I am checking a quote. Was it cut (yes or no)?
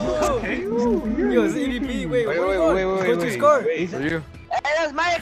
yes